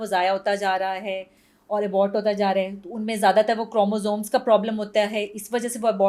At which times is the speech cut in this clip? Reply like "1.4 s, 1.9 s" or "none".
none

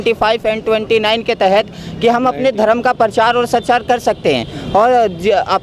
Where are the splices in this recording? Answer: none

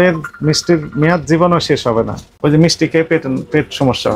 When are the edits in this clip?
2.2 s

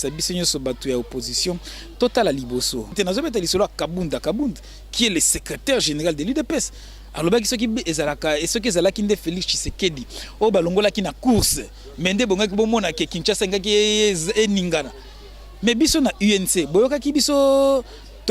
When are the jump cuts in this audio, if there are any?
2.9 s

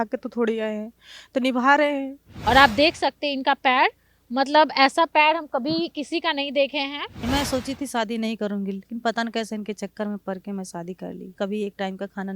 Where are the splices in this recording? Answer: 2.3 s, 7.2 s, 11.3 s

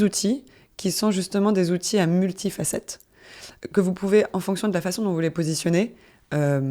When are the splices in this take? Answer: none

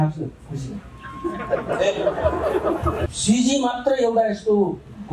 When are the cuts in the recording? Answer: 3.1 s

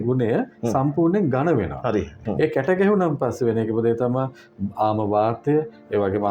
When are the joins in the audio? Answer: 2.1 s

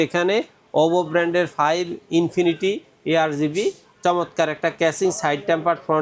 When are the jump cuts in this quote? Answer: none

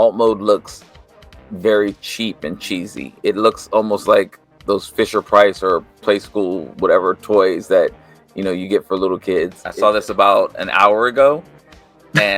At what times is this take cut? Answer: 9.6 s

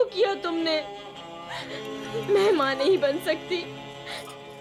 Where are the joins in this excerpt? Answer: 2.0 s

